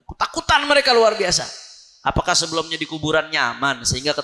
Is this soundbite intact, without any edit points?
yes; 0 cuts

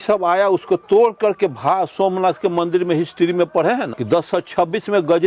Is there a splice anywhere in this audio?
yes; 1 cut; at 4.0 s

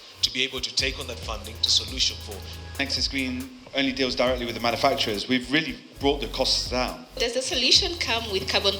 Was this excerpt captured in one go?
no; 2 cuts; at 2.8 s, 7.0 s

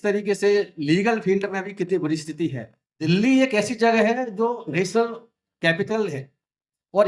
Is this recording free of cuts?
no; 1 cut; at 3.1 s

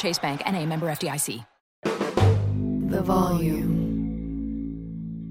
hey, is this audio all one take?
no; 1 cut; at 1.5 s

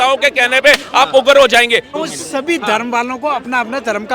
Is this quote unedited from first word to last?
no; 1 cut; at 1.9 s

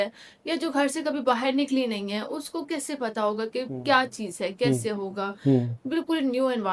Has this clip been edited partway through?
no; 0 cuts

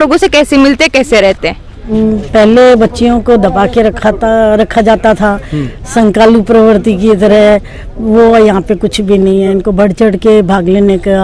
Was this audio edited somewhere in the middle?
yes; 1 cut; at 1.8 s

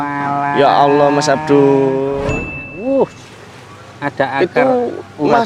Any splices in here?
yes; 1 cut; at 2.2 s

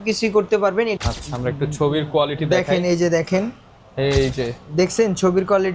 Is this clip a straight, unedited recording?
no; 1 cut; at 0.9 s

